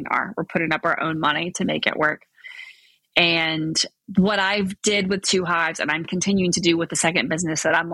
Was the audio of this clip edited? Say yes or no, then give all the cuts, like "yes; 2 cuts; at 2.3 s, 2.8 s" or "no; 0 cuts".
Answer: no; 0 cuts